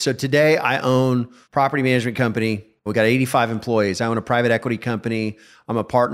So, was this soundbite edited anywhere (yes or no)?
yes